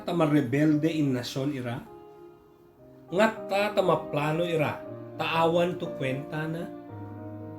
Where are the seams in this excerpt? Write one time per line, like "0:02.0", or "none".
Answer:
0:06.6